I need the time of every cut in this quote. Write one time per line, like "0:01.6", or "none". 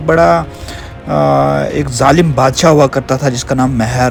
none

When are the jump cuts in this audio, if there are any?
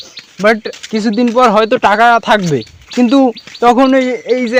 none

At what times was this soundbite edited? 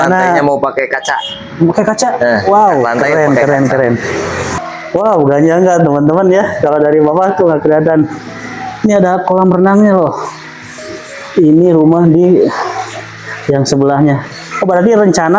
0:04.5

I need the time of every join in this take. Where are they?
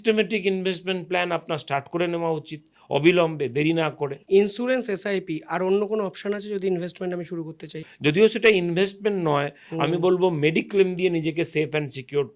0:04.1
0:07.8

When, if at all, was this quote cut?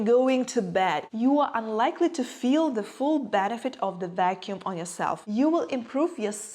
0:01.1
0:05.2

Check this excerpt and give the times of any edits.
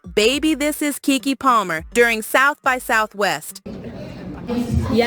0:03.7

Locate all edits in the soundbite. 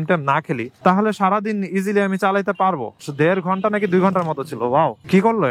0:03.0

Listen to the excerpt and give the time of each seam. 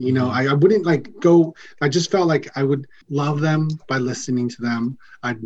none

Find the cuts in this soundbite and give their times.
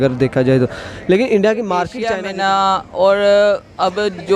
0:02.1

